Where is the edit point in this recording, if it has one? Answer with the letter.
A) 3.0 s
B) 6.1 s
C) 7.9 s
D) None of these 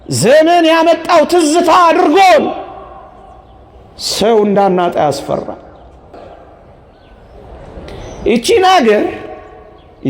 B